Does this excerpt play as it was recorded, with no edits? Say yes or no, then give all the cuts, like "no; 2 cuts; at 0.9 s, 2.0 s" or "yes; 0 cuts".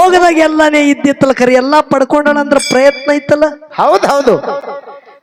yes; 0 cuts